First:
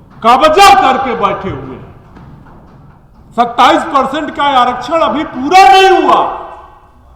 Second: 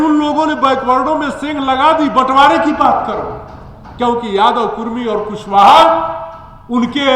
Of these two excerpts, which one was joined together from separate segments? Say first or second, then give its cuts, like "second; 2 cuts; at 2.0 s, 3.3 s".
first; 1 cut; at 2.9 s